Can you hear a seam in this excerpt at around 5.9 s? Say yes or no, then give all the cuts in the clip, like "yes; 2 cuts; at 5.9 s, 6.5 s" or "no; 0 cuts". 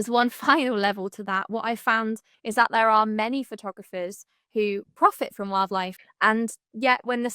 yes; 2 cuts; at 2.3 s, 5.9 s